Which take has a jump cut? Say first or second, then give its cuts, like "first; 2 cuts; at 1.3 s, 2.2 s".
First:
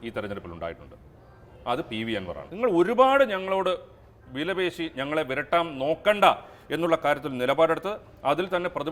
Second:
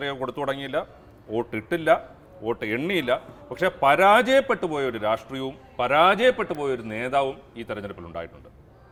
first; 1 cut; at 2.4 s